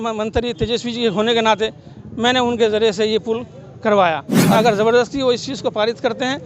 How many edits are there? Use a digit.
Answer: 1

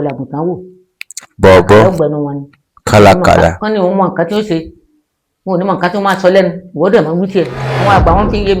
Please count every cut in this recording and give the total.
1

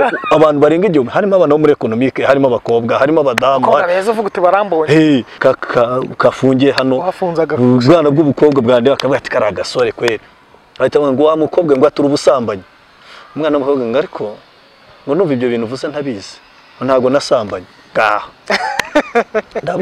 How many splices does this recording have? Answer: 1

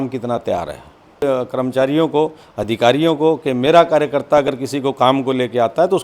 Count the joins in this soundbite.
1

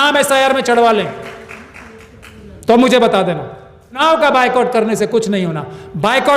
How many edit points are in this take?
1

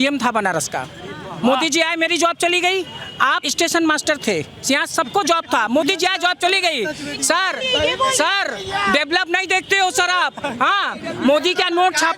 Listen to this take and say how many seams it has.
1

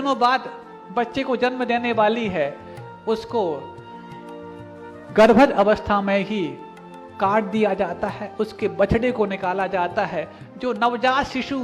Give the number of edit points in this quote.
0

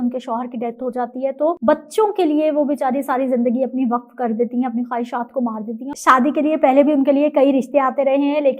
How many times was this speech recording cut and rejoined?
2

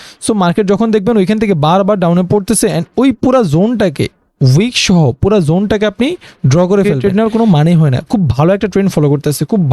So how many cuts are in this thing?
1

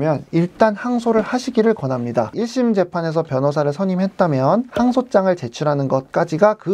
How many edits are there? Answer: 1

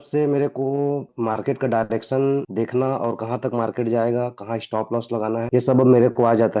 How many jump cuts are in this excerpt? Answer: 1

